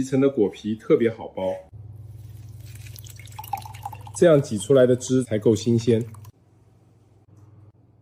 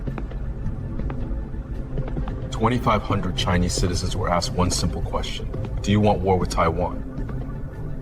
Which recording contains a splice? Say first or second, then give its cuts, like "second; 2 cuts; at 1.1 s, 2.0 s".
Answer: second; 1 cut; at 1.5 s